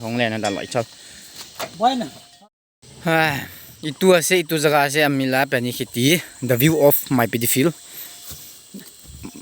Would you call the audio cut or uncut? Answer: cut